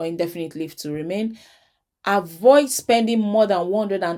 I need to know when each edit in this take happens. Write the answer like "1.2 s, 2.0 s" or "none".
none